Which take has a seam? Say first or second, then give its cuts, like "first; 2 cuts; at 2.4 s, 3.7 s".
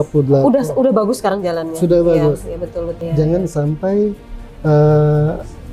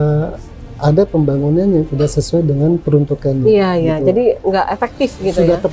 first; 1 cut; at 3.0 s